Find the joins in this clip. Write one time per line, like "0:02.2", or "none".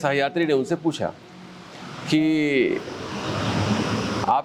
none